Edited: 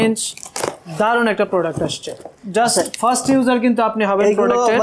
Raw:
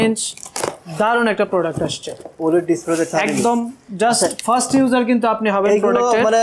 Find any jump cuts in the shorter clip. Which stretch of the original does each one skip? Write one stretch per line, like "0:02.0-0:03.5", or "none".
0:02.3-0:03.7